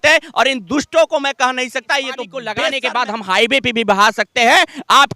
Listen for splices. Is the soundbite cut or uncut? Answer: cut